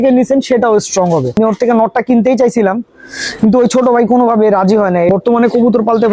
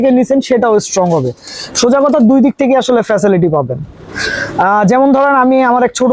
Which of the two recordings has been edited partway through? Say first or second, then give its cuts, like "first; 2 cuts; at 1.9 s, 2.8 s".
first; 2 cuts; at 1.3 s, 5.1 s